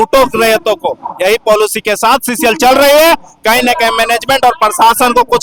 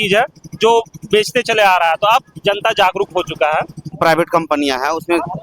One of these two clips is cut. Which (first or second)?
second